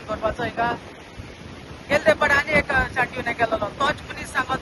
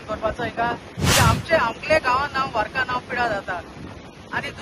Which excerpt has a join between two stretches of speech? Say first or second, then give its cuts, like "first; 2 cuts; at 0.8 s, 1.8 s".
second; 1 cut; at 0.9 s